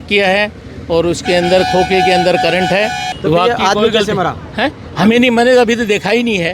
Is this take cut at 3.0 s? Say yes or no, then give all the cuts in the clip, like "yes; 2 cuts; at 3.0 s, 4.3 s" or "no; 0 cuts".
yes; 1 cut; at 3.0 s